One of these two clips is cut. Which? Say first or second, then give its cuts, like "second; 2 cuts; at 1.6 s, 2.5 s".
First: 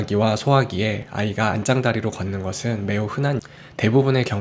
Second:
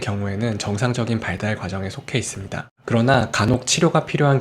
second; 1 cut; at 2.7 s